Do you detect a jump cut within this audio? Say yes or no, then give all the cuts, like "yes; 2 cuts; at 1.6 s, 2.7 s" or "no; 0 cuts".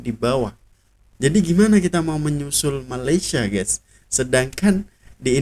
yes; 1 cut; at 1.0 s